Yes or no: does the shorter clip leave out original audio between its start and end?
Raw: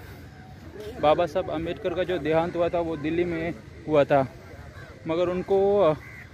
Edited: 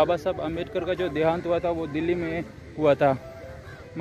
no